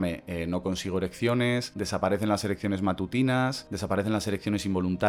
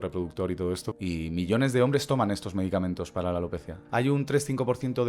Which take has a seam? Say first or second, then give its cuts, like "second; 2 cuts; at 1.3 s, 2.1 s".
second; 2 cuts; at 0.9 s, 3.8 s